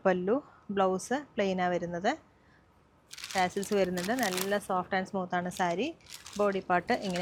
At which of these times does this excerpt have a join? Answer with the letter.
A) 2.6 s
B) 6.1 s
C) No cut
C